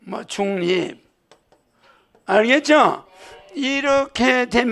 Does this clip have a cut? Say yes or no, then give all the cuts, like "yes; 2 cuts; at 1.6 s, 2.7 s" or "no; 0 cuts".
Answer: no; 0 cuts